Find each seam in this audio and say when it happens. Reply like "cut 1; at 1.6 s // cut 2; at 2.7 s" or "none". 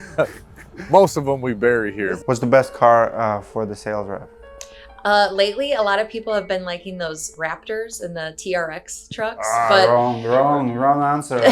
cut 1; at 2.0 s